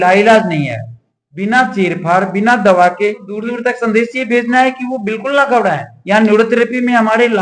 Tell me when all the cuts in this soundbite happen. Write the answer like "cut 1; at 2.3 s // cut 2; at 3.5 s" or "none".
cut 1; at 3.4 s